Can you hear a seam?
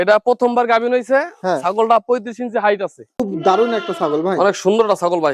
yes; 1 cut; at 3.2 s

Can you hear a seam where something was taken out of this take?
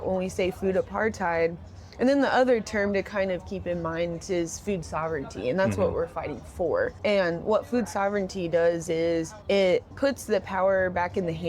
yes; 3 cuts; at 6.9 s, 9.3 s, 9.9 s

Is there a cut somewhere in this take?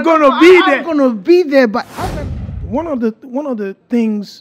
yes; 1 cut; at 2.6 s

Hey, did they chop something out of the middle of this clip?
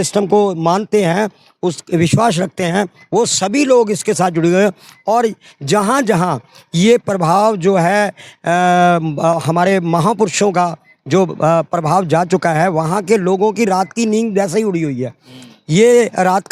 no; 0 cuts

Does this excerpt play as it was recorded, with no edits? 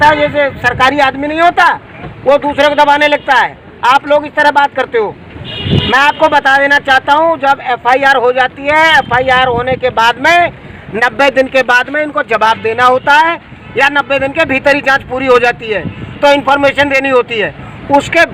yes; 0 cuts

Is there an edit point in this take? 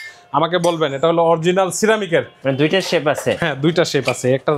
yes; 1 cut; at 2.3 s

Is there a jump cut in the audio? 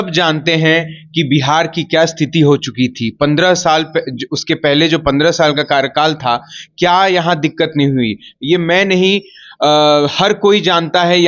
no; 0 cuts

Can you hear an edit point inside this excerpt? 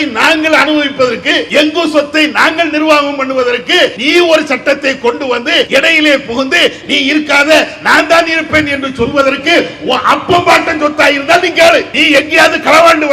yes; 4 cuts; at 1.4 s, 4.0 s, 5.7 s, 11.9 s

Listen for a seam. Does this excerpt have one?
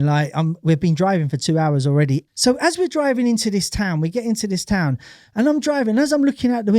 yes; 1 cut; at 2.2 s

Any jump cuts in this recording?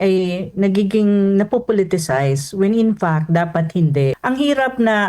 yes; 1 cut; at 4.2 s

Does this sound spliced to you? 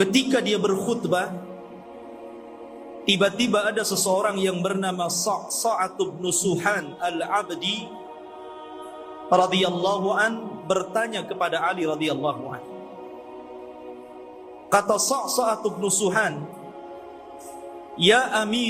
no; 0 cuts

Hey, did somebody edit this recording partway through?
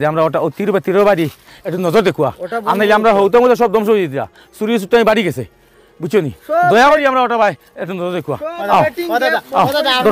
no; 0 cuts

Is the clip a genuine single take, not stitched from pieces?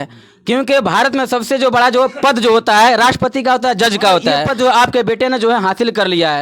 no; 1 cut; at 4.5 s

